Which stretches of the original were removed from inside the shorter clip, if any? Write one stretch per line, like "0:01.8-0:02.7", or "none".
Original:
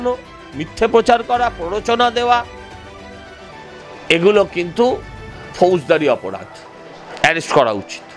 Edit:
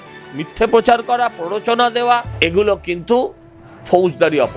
0:02.5-0:04.0